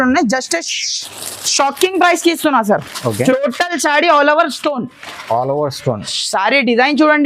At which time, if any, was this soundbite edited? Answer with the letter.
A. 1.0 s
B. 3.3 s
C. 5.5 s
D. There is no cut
B